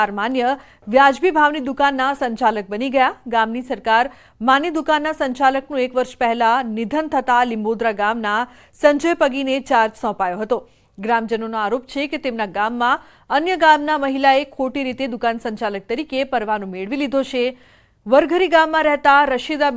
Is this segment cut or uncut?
cut